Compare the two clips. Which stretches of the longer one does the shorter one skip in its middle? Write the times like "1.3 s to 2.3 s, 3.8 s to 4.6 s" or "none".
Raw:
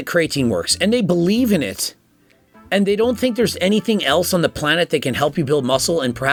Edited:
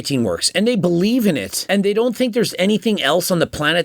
1.8 s to 2.5 s